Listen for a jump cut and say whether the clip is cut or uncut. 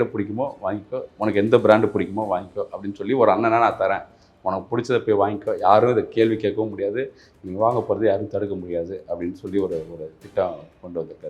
uncut